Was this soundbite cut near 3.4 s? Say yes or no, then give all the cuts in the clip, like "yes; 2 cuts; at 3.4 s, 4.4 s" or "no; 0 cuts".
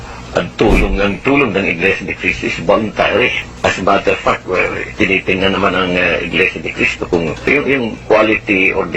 yes; 2 cuts; at 3.4 s, 7.5 s